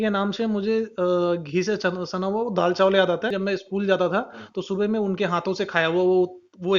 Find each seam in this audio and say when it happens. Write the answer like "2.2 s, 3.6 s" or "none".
3.3 s